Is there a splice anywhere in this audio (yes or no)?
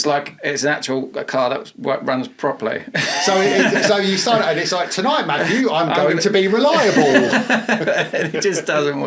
no